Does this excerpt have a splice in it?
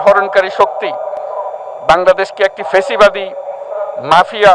no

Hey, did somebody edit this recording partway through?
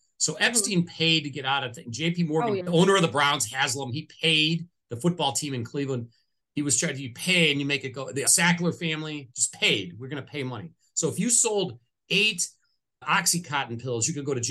yes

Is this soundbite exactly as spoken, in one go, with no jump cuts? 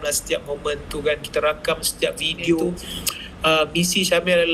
no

